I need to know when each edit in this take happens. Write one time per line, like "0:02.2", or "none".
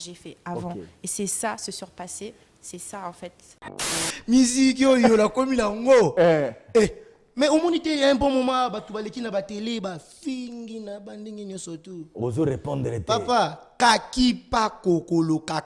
0:03.9